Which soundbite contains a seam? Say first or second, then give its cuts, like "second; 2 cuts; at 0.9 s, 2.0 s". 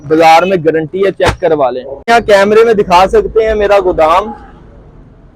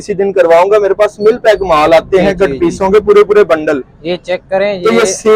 first; 1 cut; at 2.1 s